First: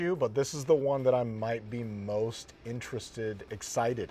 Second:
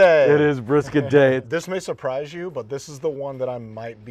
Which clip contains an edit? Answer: second; 1 cut; at 1.4 s

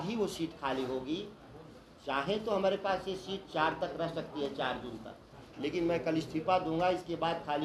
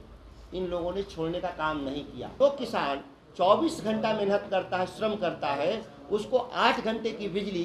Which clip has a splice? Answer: second; 1 cut; at 2.2 s

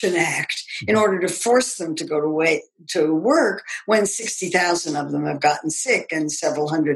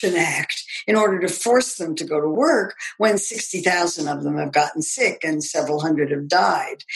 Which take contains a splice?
second; 1 cut; at 2.3 s

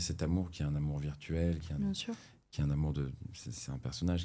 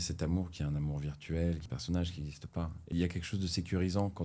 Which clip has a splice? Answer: second; 2 cuts; at 1.7 s, 2.9 s

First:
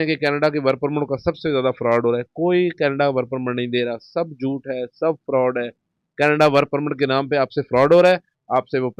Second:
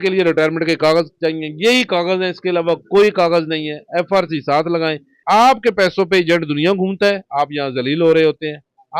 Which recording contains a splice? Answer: second; 1 cut; at 5.1 s

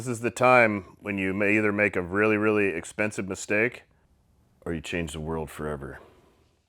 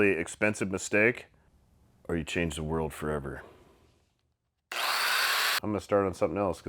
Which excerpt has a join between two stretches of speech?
second; 1 cut; at 5.6 s

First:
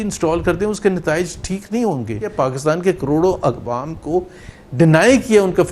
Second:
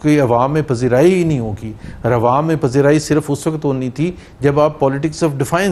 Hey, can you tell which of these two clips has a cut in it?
first; 1 cut; at 2.3 s

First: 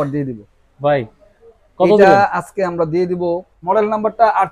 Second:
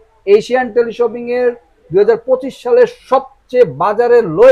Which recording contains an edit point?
first; 1 cut; at 3.6 s

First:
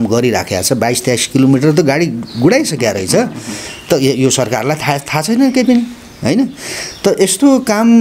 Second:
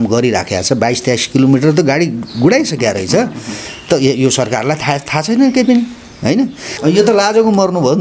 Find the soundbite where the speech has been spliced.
second; 1 cut; at 6.7 s

